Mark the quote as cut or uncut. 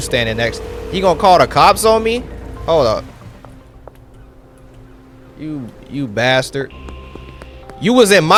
uncut